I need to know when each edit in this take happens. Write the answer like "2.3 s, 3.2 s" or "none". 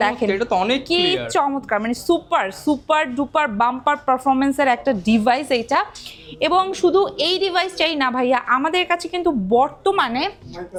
none